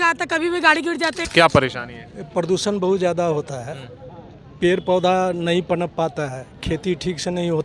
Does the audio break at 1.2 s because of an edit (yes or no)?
yes